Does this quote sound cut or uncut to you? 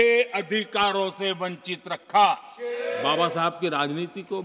cut